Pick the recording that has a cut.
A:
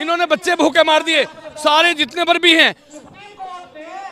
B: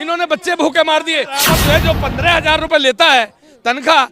B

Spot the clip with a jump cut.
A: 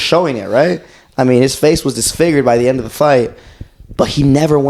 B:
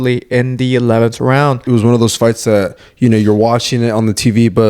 B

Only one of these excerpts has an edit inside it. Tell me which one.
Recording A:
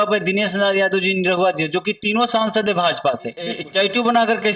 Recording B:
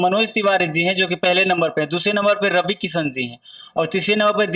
A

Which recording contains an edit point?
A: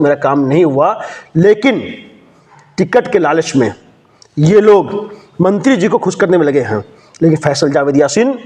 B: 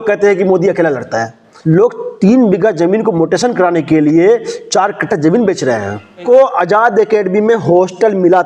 B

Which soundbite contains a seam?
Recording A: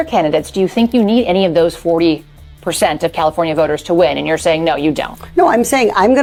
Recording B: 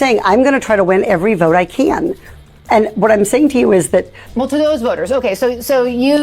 B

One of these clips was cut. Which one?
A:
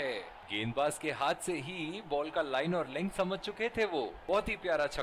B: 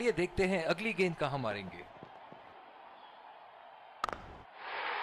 B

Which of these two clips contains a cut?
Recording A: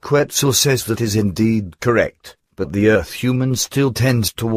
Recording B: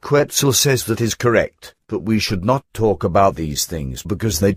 A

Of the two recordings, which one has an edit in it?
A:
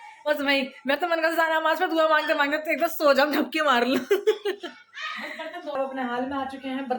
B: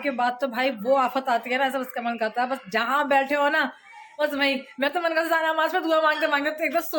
A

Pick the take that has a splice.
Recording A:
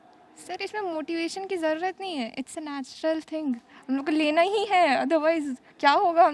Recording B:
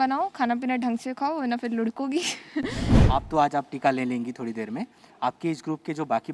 B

